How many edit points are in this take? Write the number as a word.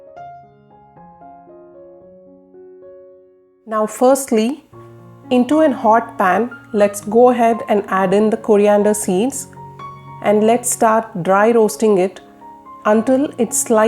one